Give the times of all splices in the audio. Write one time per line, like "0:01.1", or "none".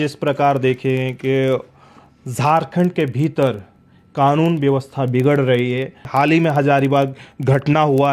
0:06.0